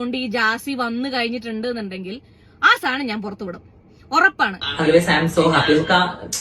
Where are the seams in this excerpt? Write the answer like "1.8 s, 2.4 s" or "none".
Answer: 4.8 s